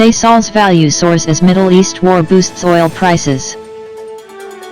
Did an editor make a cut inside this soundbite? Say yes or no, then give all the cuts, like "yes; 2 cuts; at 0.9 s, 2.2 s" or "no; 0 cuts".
yes; 1 cut; at 3.6 s